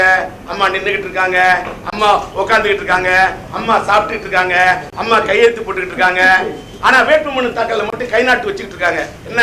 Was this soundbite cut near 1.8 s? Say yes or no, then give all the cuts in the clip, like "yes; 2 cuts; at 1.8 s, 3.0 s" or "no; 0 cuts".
no; 0 cuts